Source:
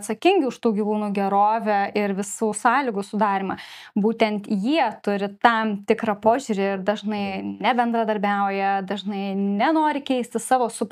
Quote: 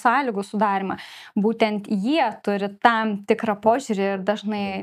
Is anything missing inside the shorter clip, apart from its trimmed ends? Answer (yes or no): no